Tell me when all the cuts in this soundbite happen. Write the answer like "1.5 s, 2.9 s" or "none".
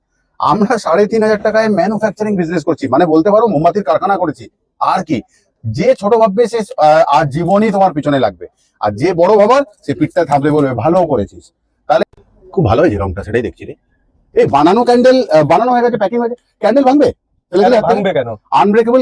12.0 s